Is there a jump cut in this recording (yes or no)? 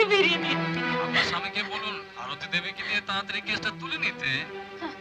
no